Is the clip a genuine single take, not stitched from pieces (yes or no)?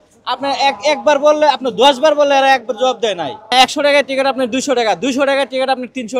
no